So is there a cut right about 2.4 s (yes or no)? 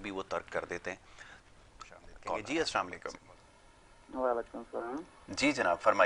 yes